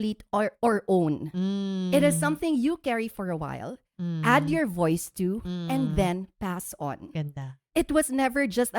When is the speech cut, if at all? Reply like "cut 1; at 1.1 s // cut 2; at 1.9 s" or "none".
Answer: cut 1; at 7.6 s